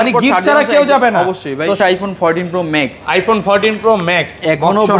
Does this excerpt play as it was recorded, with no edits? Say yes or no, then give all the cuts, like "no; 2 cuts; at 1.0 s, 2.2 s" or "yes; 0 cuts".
no; 1 cut; at 1.8 s